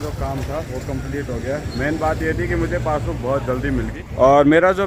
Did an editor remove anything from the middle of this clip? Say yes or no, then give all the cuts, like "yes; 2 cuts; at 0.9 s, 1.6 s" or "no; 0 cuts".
no; 0 cuts